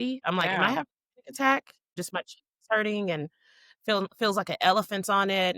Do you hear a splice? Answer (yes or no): yes